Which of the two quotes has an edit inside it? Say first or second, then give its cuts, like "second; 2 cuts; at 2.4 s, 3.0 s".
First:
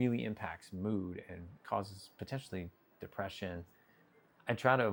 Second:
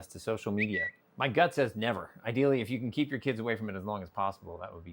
second; 1 cut; at 1.0 s